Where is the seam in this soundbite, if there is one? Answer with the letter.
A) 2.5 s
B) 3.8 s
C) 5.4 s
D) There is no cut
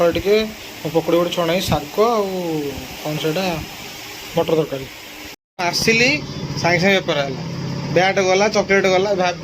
C